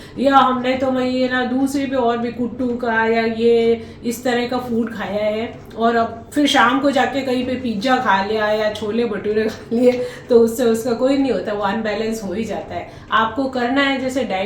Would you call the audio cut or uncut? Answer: uncut